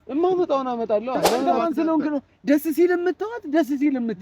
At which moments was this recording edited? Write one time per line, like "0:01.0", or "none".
0:01.4

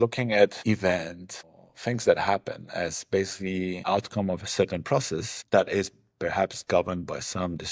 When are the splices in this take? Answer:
none

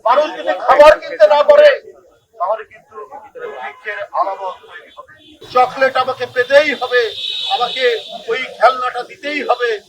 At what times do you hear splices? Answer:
0:05.4

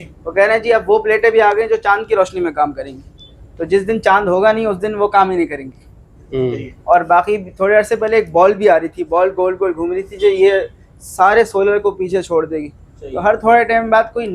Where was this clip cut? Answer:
none

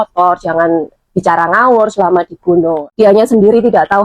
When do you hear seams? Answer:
0:02.8

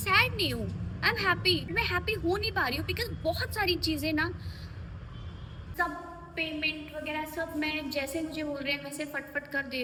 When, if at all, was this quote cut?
none

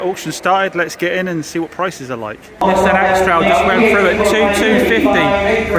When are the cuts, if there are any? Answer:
0:02.6

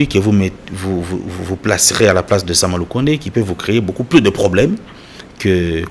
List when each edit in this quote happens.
none

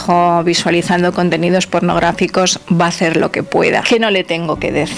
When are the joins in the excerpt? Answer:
0:03.8

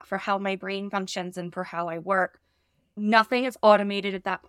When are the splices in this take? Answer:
0:03.0

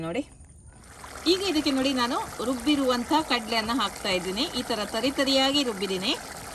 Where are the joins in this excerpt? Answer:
0:01.0

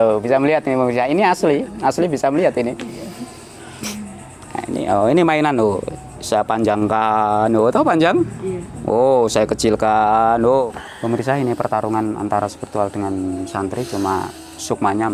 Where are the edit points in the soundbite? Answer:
0:10.7

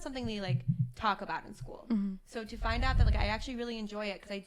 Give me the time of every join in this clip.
none

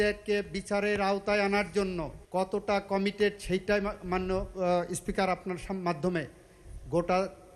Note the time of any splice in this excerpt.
0:02.1

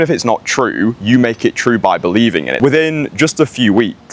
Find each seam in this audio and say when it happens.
0:02.5

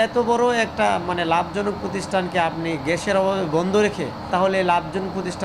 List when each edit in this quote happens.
0:04.3

